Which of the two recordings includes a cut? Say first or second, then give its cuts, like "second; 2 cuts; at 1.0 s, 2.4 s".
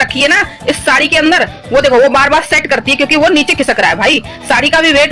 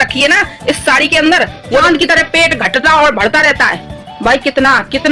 second; 1 cut; at 1.8 s